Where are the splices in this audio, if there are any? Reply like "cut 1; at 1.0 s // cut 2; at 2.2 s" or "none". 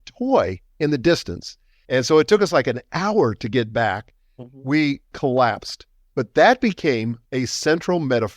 cut 1; at 1.7 s // cut 2; at 7.2 s